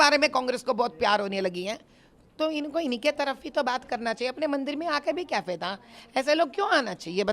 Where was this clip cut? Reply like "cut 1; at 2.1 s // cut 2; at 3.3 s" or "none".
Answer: none